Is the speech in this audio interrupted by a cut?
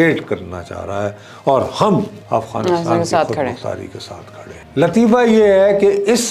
yes; 1 cut; at 4.5 s

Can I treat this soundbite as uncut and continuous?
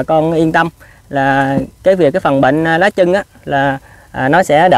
yes; 0 cuts

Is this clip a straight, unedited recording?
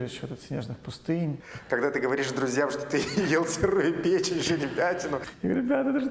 no; 2 cuts; at 1.5 s, 5.2 s

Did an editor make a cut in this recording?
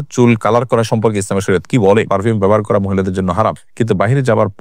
yes; 2 cuts; at 2.1 s, 3.7 s

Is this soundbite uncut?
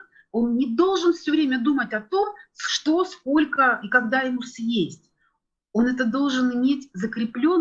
yes; 0 cuts

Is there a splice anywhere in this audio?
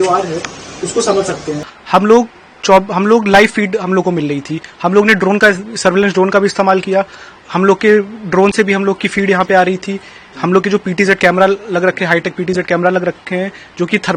yes; 1 cut; at 1.6 s

